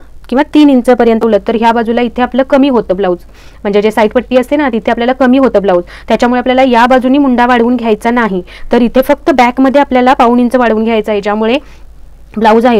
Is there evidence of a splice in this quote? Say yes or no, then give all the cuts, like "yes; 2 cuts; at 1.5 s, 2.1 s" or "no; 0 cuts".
yes; 1 cut; at 1.2 s